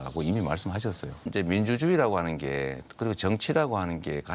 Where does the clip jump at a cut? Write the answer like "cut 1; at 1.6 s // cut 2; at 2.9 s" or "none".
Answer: cut 1; at 1.3 s